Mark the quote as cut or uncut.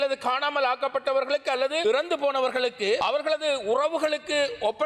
uncut